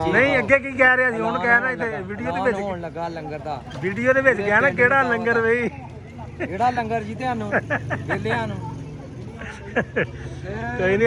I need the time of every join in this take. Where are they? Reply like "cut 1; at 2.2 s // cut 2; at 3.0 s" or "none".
none

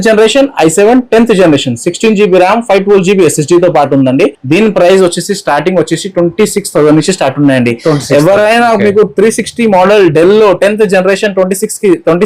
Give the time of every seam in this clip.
cut 1; at 4.4 s

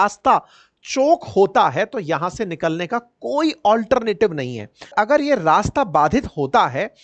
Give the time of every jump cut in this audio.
cut 1; at 4.9 s

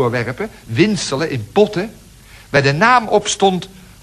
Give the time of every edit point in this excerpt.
none

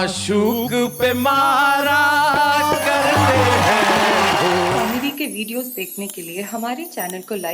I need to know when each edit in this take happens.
cut 1; at 4.8 s

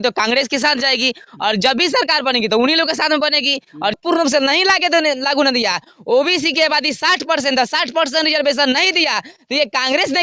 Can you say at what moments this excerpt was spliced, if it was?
cut 1; at 4.0 s

